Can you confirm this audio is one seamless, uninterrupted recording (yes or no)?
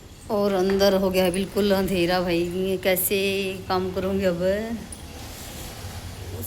yes